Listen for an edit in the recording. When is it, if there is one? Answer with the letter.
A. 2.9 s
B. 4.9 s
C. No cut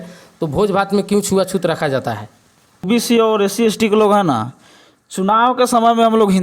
A